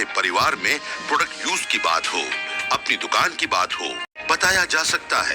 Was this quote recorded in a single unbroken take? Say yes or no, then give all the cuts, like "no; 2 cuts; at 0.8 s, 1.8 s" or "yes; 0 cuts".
no; 1 cut; at 4.1 s